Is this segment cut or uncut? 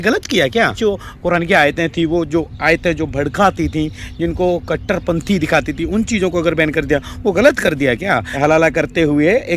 cut